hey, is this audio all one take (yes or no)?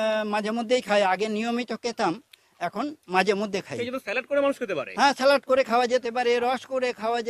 yes